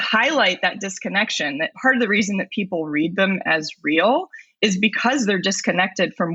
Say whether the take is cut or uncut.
uncut